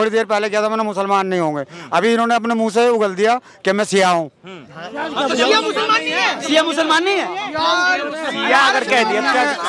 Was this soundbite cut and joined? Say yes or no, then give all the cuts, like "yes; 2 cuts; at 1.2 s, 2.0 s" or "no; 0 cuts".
no; 0 cuts